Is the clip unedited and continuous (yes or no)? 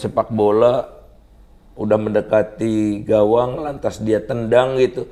yes